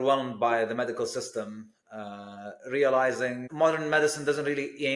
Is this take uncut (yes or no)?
no